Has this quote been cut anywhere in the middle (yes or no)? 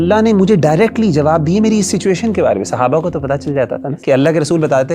yes